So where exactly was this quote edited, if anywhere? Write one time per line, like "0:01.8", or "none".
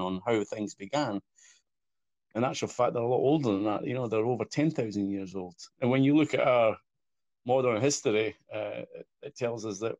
0:01.8